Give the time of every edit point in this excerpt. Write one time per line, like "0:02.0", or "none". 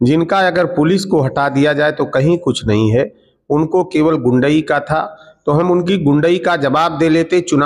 none